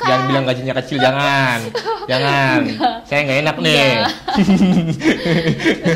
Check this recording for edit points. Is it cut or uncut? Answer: uncut